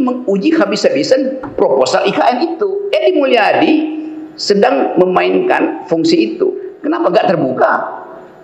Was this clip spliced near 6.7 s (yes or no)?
yes